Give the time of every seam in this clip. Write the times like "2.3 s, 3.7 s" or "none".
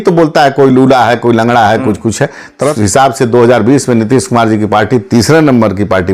2.7 s